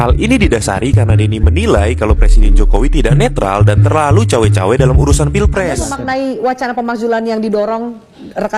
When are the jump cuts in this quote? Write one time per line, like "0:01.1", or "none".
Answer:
0:05.8